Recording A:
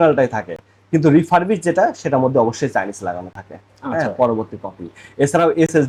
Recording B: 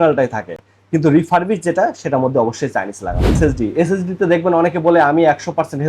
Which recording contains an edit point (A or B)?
B